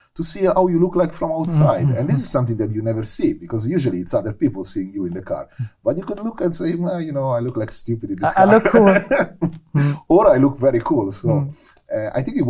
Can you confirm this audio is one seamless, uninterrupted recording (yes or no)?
yes